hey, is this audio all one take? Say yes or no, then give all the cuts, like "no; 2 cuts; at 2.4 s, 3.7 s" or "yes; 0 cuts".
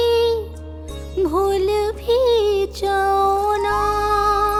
yes; 0 cuts